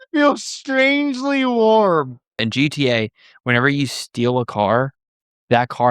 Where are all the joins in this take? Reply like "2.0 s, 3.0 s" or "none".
2.4 s